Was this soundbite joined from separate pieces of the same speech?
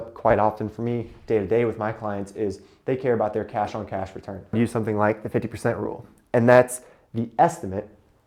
yes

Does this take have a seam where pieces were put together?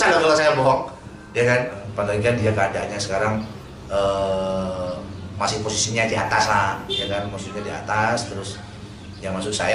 yes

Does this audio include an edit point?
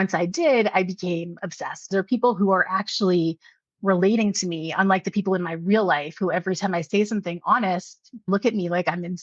yes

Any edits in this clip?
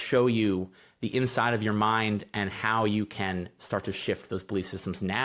no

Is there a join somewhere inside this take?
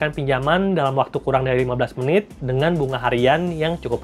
no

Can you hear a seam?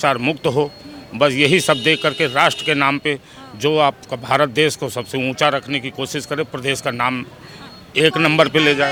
no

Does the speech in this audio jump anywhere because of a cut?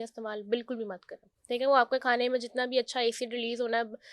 no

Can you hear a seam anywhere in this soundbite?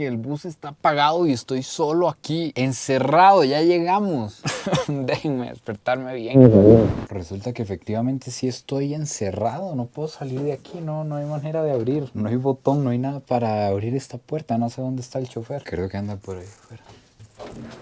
no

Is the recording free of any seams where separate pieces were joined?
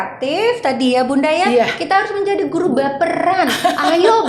yes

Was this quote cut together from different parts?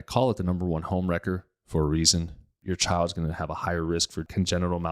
yes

